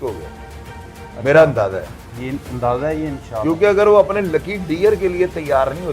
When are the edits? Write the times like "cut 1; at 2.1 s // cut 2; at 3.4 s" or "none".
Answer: none